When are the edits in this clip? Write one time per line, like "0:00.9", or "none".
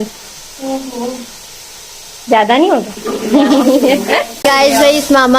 0:04.4